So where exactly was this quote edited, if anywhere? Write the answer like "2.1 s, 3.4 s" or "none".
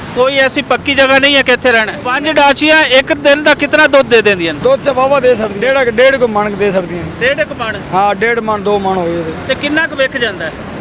2.0 s, 4.6 s, 5.5 s